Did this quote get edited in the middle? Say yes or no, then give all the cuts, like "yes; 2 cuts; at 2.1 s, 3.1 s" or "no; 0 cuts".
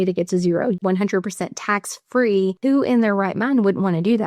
yes; 2 cuts; at 0.8 s, 2.6 s